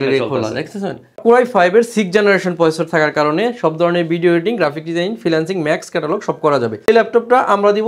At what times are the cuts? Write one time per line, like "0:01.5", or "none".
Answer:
0:01.2
0:06.9